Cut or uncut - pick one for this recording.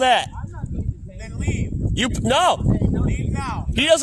uncut